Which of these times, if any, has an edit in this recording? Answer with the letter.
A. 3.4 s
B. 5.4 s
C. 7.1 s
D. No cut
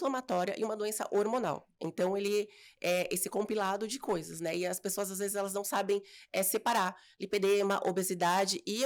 D